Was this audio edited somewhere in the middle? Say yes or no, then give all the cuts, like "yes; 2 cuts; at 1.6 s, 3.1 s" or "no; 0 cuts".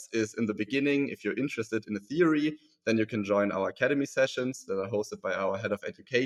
no; 0 cuts